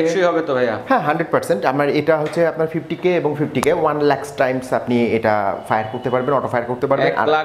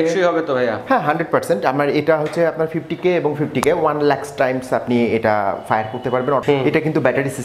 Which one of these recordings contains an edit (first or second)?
second